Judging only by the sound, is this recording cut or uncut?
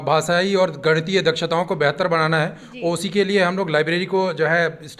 uncut